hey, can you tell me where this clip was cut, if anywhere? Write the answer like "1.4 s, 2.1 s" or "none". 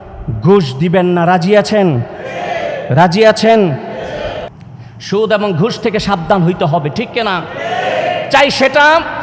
4.5 s